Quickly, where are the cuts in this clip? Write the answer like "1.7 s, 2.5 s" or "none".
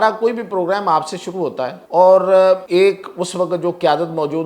1.8 s, 2.6 s